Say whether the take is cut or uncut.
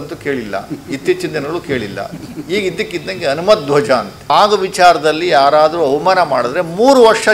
cut